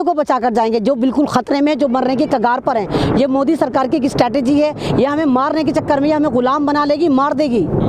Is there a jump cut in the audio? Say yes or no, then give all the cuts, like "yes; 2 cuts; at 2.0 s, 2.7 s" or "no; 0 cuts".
no; 0 cuts